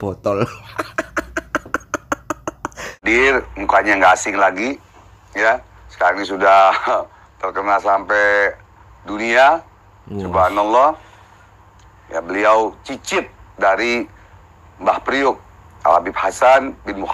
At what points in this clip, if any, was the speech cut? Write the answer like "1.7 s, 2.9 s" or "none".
3.0 s